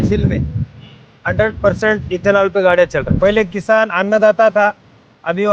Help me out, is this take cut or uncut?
cut